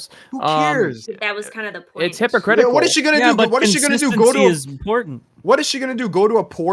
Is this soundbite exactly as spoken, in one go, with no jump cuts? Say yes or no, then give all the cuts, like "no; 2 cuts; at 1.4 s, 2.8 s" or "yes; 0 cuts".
no; 1 cut; at 1.1 s